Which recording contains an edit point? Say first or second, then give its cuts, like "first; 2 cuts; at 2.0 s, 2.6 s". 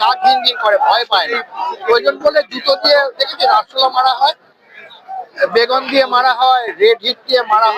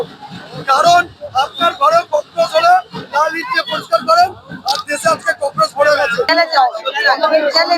second; 1 cut; at 6.3 s